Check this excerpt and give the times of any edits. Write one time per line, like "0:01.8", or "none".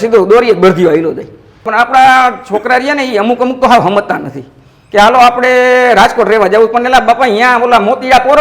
0:01.7